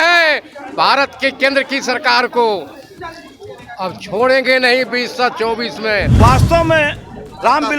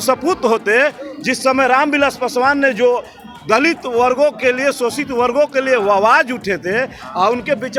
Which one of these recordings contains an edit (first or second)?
first